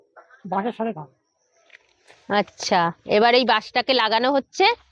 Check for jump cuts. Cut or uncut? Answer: uncut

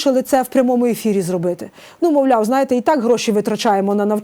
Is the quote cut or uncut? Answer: uncut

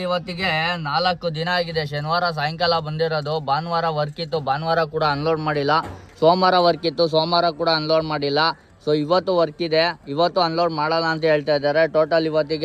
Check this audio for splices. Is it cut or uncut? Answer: uncut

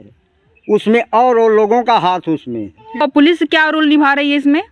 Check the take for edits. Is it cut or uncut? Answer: cut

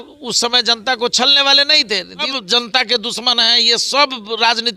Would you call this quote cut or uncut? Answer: cut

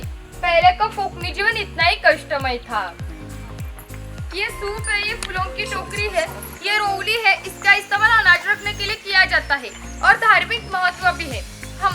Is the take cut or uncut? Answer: uncut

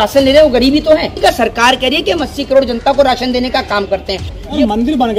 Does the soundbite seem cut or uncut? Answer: cut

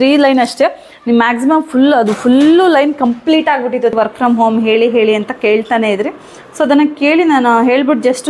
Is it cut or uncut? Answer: cut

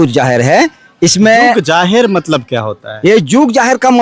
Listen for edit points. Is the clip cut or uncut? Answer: uncut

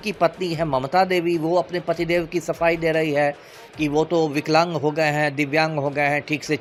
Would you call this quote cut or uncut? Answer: uncut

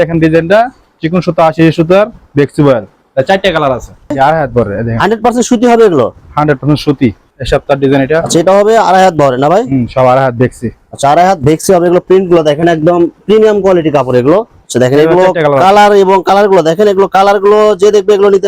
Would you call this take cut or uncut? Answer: cut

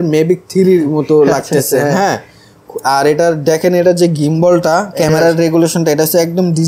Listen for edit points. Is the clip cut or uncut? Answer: uncut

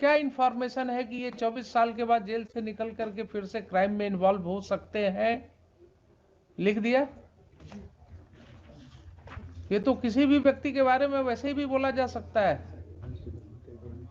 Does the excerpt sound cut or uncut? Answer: uncut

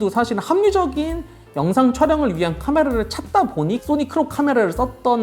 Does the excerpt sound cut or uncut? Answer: uncut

